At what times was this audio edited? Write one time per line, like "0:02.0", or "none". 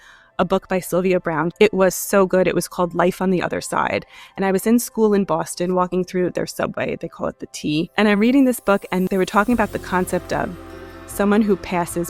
0:01.5
0:07.9
0:09.1